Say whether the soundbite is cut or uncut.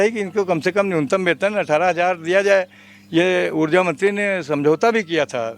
uncut